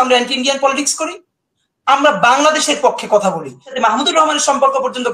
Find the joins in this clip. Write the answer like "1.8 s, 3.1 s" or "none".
3.7 s